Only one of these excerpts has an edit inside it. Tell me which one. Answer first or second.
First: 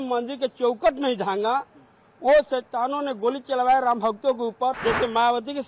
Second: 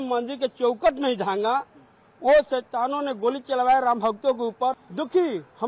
first